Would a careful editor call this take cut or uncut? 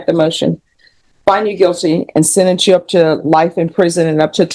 uncut